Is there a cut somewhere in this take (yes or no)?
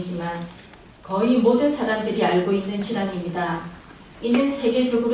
no